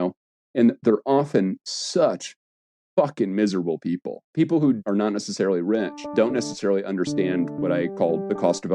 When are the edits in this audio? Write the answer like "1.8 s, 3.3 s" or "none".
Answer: 4.1 s, 4.8 s, 6.1 s, 7.9 s